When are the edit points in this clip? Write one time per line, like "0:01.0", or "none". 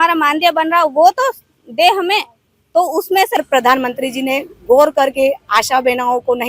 0:03.4